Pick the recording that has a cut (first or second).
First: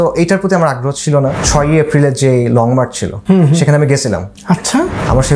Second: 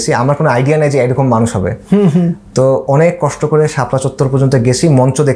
first